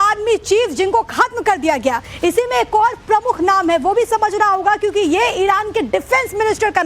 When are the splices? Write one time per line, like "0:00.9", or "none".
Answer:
0:02.1